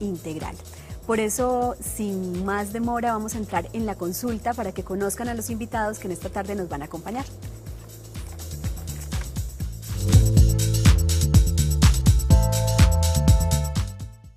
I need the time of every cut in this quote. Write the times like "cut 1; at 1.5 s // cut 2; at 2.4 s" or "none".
cut 1; at 12.5 s